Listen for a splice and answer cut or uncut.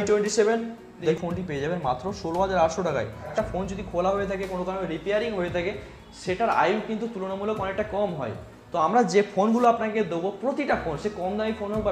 cut